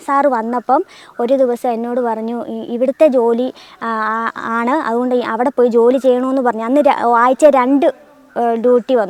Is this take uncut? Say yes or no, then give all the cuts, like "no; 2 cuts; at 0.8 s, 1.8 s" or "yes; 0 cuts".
yes; 0 cuts